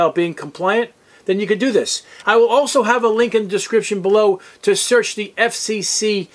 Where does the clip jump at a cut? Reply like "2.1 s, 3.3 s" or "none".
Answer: 2.2 s